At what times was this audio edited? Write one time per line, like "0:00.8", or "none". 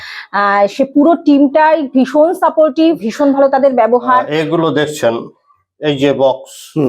0:04.3